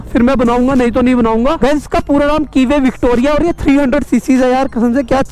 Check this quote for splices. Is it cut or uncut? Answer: cut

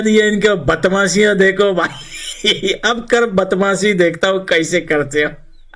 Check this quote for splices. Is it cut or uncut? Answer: uncut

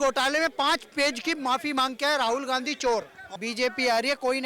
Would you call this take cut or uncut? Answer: cut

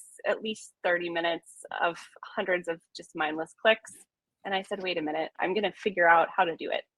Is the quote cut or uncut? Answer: cut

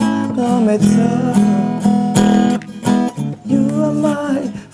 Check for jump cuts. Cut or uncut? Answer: uncut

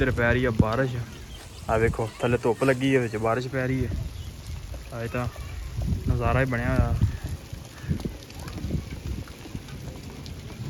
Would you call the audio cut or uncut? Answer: uncut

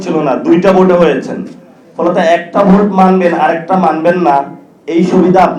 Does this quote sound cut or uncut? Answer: uncut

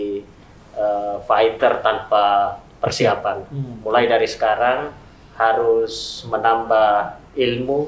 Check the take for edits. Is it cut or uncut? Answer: uncut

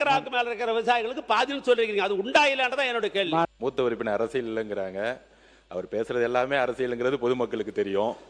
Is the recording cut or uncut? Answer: cut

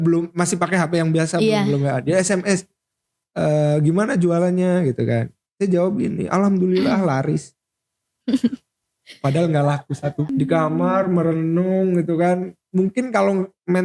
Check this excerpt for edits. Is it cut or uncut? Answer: cut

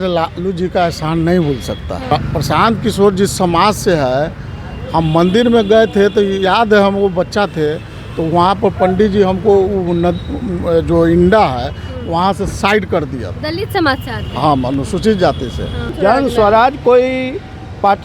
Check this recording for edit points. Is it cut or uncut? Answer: cut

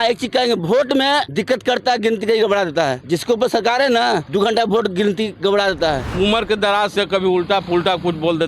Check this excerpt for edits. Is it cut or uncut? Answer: cut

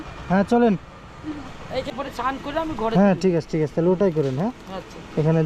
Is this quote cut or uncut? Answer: cut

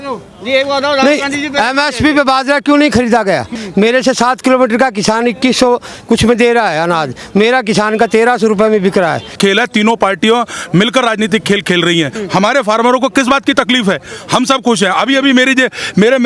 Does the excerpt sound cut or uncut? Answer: cut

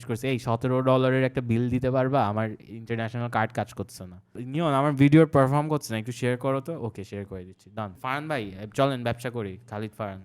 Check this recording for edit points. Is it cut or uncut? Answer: cut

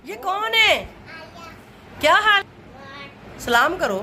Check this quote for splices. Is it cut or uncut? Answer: cut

